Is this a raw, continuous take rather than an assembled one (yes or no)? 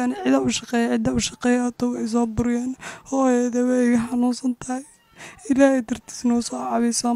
yes